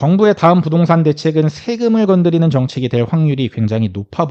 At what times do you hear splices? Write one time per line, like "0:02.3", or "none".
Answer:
none